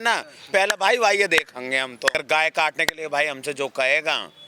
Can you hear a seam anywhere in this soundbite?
yes; 1 cut; at 2.2 s

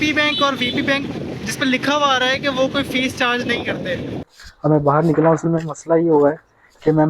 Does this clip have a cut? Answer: yes; 1 cut; at 4.4 s

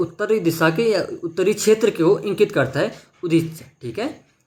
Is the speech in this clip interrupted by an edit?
no; 0 cuts

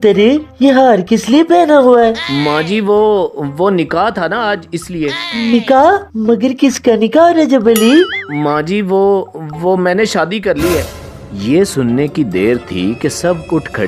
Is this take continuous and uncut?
yes; 0 cuts

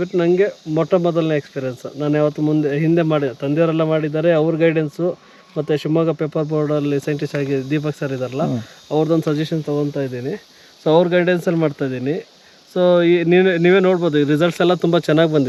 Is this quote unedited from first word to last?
yes; 0 cuts

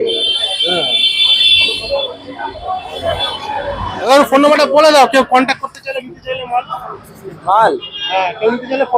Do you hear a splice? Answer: yes; 1 cut; at 4.1 s

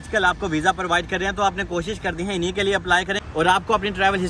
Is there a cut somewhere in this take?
yes; 1 cut; at 3.2 s

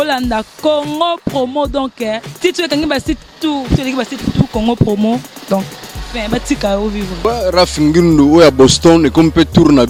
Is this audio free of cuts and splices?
yes; 0 cuts

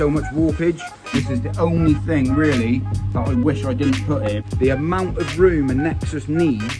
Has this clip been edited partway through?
yes; 2 cuts; at 1.2 s, 4.4 s

